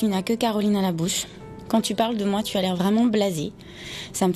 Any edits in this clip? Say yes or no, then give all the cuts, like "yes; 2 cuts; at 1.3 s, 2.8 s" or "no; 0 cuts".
no; 0 cuts